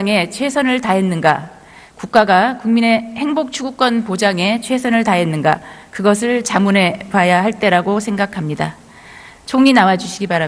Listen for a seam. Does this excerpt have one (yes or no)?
yes